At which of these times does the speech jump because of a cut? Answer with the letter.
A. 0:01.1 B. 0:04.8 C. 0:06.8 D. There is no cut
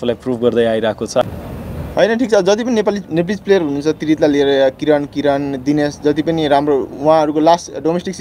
A